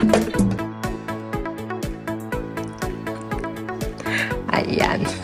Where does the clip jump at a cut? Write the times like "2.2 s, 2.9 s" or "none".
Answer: none